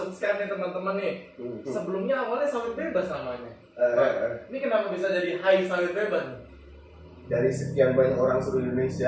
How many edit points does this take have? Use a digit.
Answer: 1